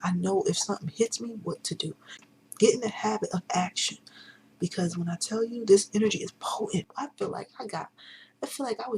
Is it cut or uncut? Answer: cut